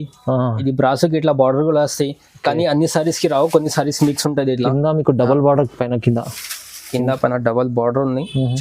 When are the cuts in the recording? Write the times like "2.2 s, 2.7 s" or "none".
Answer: none